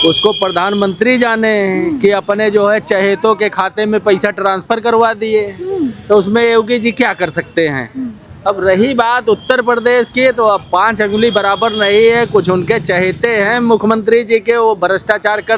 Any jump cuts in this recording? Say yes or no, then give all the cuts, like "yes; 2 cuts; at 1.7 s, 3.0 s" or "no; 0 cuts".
no; 0 cuts